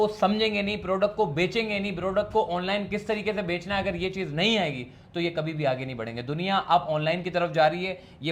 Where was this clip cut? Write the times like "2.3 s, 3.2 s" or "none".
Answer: none